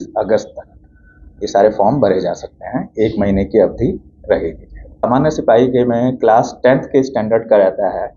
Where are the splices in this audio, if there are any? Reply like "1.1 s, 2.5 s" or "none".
5.0 s

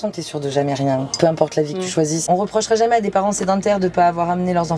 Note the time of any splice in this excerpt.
2.3 s

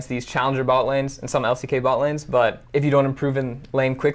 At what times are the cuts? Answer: 2.6 s

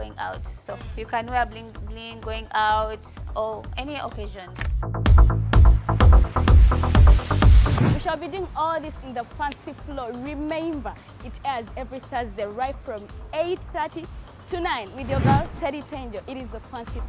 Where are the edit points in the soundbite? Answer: none

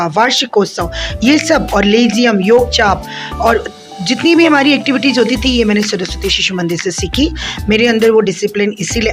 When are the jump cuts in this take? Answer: none

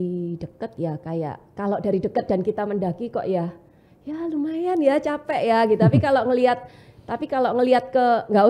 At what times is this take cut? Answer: none

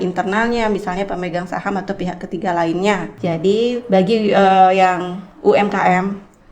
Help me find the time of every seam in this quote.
3.1 s

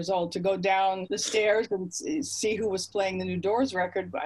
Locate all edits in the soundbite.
1.1 s

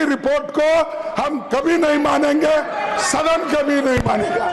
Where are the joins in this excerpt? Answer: none

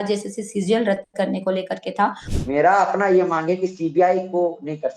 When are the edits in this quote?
2.2 s

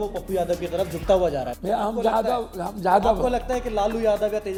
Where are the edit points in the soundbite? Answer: none

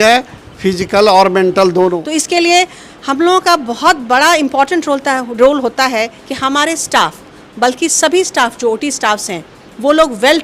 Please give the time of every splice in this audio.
2.1 s

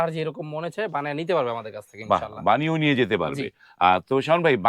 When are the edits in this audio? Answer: none

